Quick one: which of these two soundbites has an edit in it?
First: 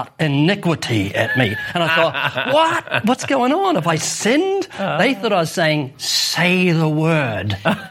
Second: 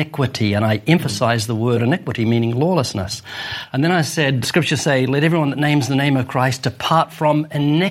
second; 2 cuts; at 1.8 s, 4.4 s

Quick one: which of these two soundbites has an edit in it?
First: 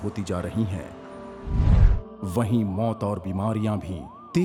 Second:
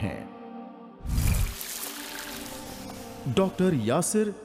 second; 1 cut; at 1.3 s

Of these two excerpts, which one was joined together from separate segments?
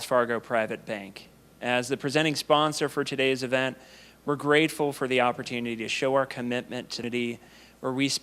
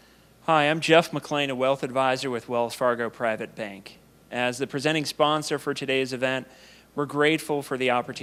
first; 1 cut; at 7.0 s

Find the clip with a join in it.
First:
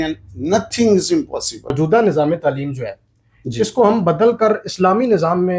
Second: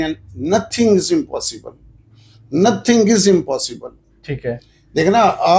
first; 1 cut; at 1.7 s

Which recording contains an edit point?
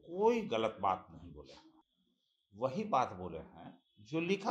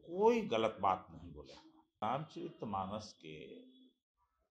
second; 1 cut; at 2.0 s

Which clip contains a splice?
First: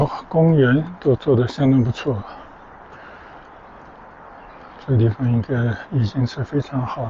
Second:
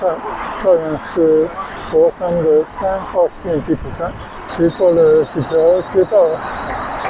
second; 1 cut; at 4.4 s

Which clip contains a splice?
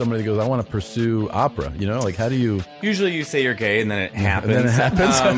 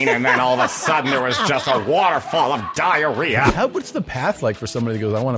second; 1 cut; at 3.5 s

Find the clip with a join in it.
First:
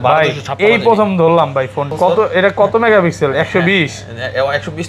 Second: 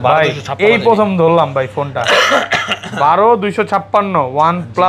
first; 1 cut; at 1.8 s

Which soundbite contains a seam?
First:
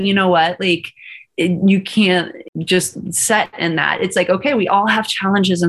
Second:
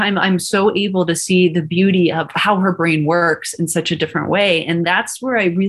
first; 1 cut; at 2.4 s

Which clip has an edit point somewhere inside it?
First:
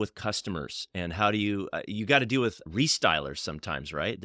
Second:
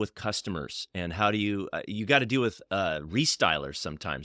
first; 1 cut; at 2.6 s

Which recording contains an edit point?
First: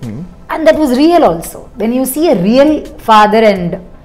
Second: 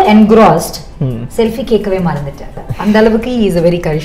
second; 1 cut; at 2.7 s

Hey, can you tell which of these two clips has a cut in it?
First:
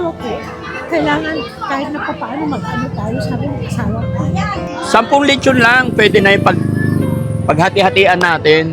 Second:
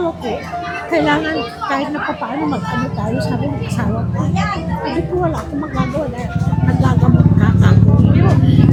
first; 1 cut; at 4.7 s

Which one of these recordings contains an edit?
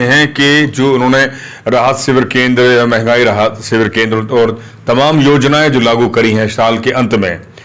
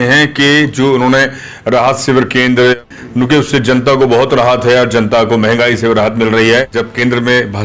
second; 2 cuts; at 2.7 s, 6.8 s

